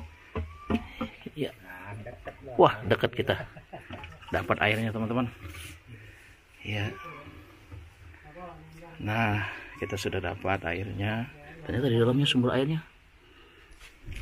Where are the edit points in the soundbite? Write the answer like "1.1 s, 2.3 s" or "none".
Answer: none